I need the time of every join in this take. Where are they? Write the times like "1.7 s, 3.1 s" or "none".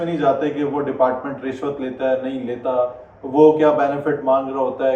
none